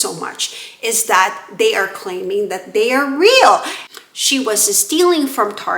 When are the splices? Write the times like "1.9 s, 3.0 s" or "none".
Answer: 3.8 s